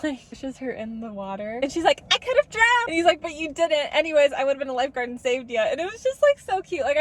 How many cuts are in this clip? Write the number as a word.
zero